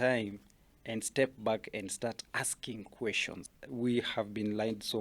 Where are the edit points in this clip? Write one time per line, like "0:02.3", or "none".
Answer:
0:03.4